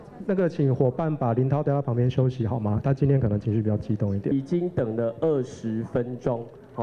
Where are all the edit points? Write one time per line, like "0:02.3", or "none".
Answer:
0:04.3

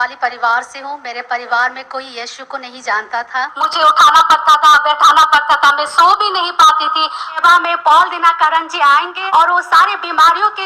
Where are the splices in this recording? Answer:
0:03.6
0:07.2
0:09.2

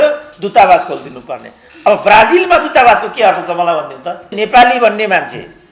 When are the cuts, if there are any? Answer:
0:04.3

